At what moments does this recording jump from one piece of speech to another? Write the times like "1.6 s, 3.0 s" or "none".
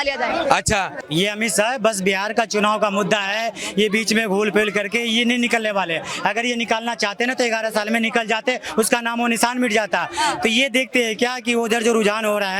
0.9 s